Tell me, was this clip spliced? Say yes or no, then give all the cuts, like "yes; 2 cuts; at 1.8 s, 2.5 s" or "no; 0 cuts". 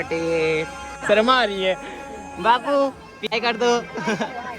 yes; 2 cuts; at 1.0 s, 3.4 s